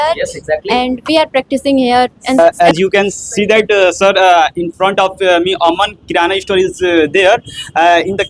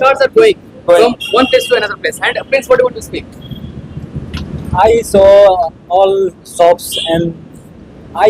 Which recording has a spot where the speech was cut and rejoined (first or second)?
first